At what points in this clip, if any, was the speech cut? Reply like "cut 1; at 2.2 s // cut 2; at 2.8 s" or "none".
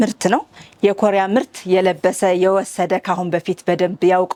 none

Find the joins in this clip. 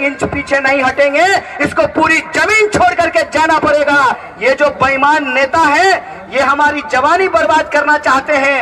cut 1; at 4.2 s

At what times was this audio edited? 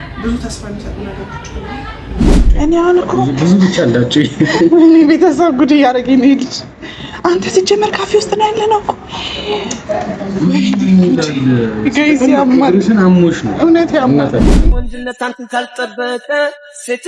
cut 1; at 2.5 s // cut 2; at 14.5 s

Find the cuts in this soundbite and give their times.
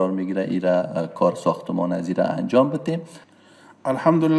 cut 1; at 3.2 s

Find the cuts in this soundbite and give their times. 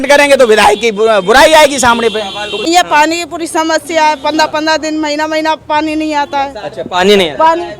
cut 1; at 2.6 s

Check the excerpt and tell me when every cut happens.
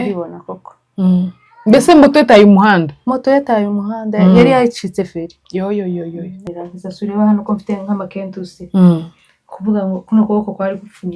cut 1; at 6.5 s

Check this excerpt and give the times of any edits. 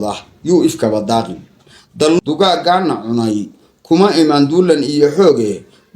cut 1; at 2.2 s

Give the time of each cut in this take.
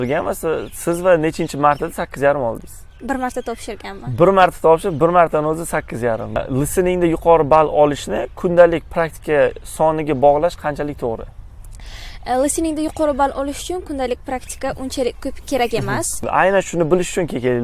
cut 1; at 6.4 s // cut 2; at 16.2 s

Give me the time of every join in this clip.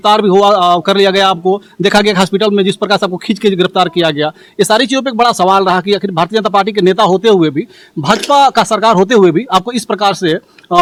none

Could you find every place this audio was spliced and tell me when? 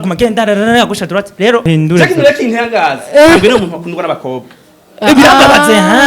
cut 1; at 1.6 s

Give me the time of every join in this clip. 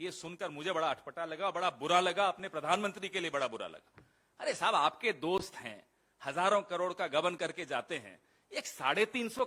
none

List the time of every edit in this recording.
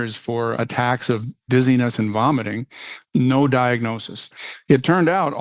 cut 1; at 1.0 s // cut 2; at 3.0 s // cut 3; at 4.3 s

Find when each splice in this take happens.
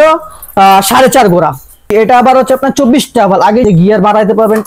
cut 1; at 1.7 s // cut 2; at 3.6 s

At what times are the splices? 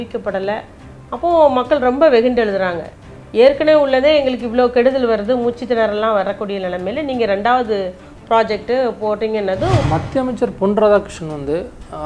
cut 1; at 9.8 s

